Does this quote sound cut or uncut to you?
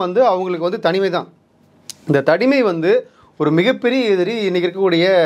uncut